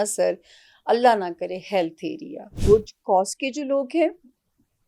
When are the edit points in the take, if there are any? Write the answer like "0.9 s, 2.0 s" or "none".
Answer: 2.6 s